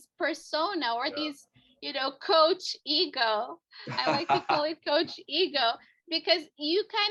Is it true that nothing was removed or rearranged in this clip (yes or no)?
yes